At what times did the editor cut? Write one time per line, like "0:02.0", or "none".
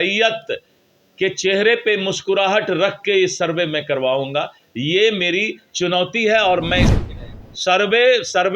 0:06.9